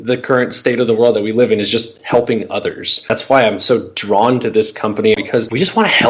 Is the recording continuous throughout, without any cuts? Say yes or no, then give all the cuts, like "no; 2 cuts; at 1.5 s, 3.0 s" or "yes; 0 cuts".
no; 2 cuts; at 3.1 s, 5.2 s